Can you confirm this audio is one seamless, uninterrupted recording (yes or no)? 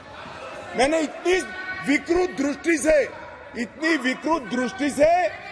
yes